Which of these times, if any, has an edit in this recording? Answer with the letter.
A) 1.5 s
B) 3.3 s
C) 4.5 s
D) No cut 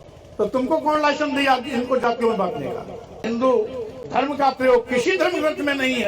B